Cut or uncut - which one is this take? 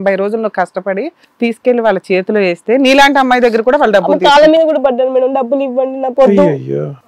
cut